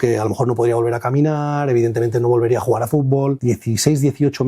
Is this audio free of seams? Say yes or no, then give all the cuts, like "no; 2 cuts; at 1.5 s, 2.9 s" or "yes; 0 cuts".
no; 1 cut; at 3.4 s